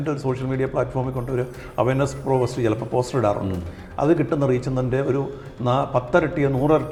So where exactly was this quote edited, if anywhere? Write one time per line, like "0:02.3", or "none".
none